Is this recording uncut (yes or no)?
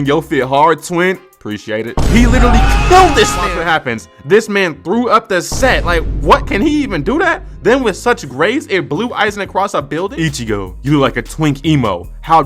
no